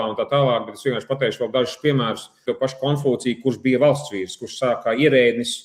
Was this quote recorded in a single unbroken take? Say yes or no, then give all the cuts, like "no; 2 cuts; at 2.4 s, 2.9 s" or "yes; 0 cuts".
no; 1 cut; at 2.4 s